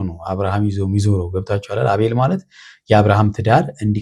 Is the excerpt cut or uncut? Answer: uncut